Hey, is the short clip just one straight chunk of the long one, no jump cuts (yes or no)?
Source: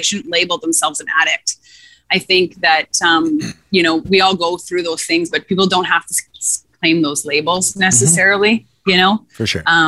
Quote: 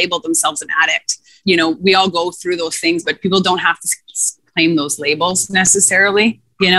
no